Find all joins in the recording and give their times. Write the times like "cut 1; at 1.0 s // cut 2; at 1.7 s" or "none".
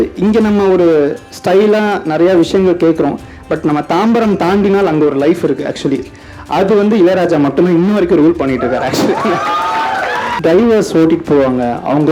cut 1; at 10.3 s